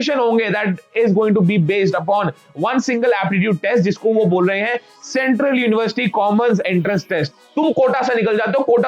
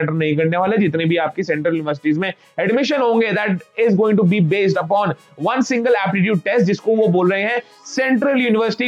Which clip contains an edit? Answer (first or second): first